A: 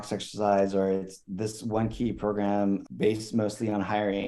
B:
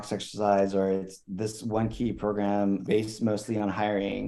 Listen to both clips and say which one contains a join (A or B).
B